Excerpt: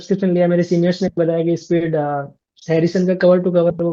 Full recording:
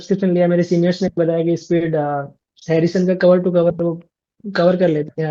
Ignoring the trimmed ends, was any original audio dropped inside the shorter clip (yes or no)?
no